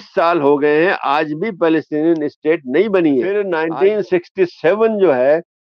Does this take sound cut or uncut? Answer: cut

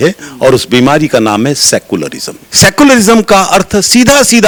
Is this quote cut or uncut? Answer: uncut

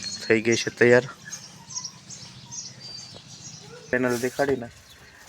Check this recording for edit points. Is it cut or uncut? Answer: cut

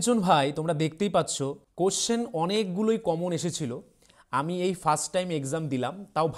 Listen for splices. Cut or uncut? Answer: cut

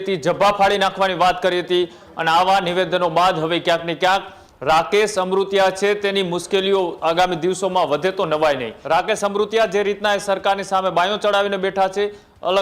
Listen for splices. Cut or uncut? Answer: cut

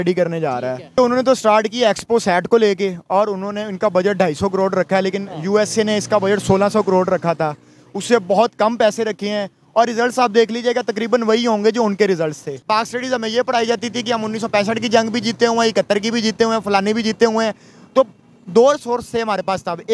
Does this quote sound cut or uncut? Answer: cut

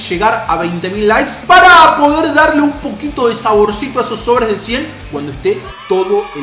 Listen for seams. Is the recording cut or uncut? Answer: uncut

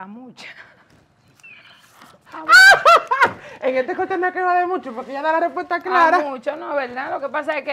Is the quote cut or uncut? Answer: uncut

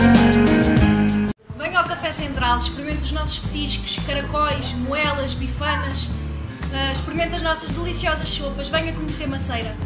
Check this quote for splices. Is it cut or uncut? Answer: cut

